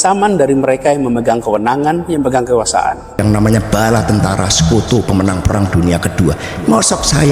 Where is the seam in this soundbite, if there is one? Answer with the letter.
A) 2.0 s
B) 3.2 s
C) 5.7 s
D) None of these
B